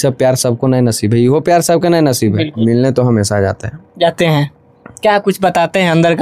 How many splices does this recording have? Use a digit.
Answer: 1